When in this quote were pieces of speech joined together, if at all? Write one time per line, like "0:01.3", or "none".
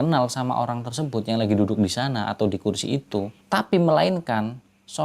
0:03.4